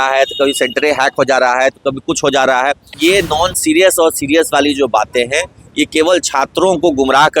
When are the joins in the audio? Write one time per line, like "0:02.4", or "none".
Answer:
0:02.9